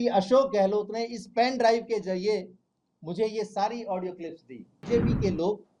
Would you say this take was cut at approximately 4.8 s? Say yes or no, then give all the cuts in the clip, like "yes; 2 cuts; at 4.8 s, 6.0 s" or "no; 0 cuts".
yes; 1 cut; at 4.8 s